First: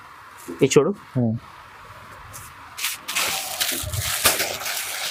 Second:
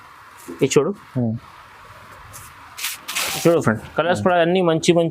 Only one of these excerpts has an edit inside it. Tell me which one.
second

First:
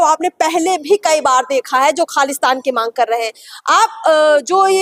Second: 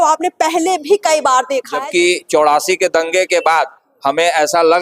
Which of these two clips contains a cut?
second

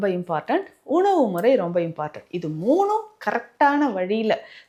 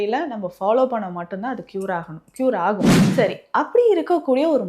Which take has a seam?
second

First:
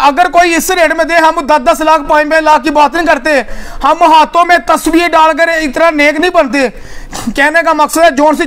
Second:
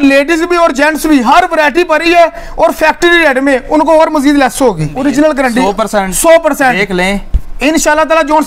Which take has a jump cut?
second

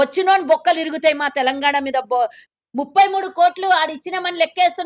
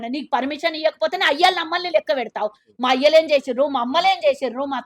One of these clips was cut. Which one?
first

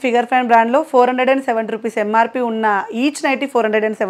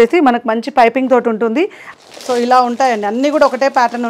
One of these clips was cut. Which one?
second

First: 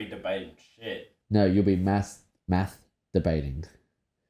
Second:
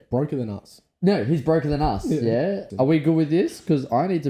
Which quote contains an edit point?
second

